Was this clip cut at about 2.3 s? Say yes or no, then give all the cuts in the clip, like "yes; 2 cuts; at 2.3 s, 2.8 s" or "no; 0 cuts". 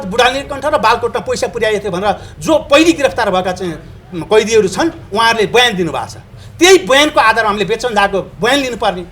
no; 0 cuts